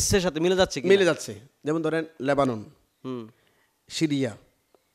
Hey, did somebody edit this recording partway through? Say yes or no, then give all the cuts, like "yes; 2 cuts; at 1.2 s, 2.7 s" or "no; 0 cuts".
no; 0 cuts